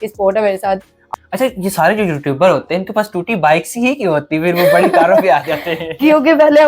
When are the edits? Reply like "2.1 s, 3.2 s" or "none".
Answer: 1.0 s